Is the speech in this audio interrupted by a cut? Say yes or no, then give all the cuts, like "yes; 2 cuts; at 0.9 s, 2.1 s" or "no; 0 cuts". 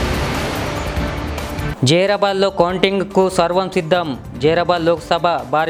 no; 0 cuts